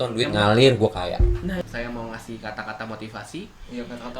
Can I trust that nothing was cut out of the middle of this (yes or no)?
no